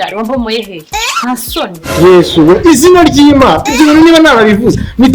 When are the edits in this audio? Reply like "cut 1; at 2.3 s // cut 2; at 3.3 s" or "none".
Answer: cut 1; at 1.8 s